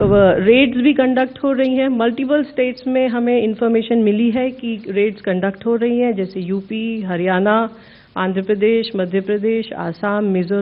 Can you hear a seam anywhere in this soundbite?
no; 0 cuts

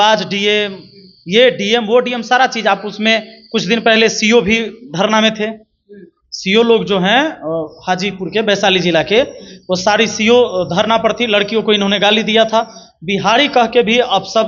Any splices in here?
no; 0 cuts

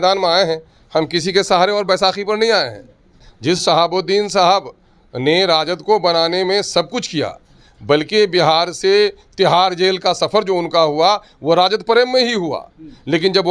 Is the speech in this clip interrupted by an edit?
yes; 1 cut; at 3.2 s

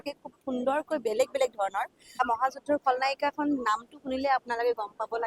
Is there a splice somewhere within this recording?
no; 0 cuts

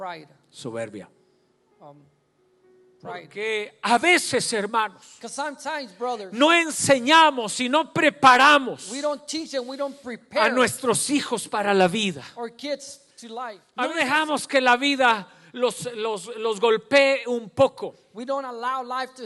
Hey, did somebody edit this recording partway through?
yes; 2 cuts; at 3.4 s, 13.6 s

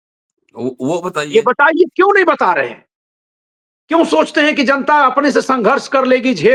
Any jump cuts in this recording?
no; 0 cuts

